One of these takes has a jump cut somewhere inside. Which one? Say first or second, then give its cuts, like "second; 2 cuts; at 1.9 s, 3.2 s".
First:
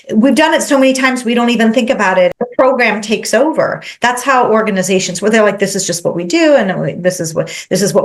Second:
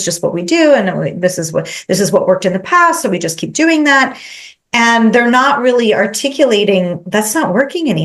first; 1 cut; at 2.3 s